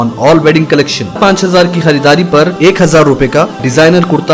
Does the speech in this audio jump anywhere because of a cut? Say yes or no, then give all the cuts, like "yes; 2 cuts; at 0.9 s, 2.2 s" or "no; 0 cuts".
yes; 1 cut; at 1.2 s